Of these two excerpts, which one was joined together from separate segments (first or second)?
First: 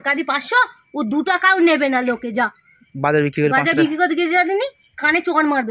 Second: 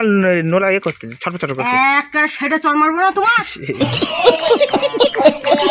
second